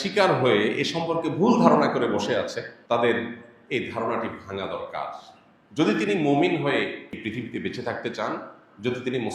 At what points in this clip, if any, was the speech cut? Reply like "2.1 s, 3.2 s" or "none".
2.7 s, 7.1 s